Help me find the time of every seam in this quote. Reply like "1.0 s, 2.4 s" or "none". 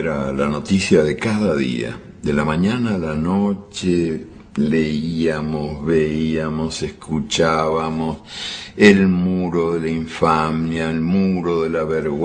none